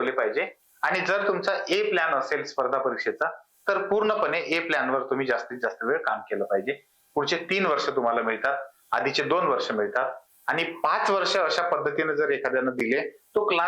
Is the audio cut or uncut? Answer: uncut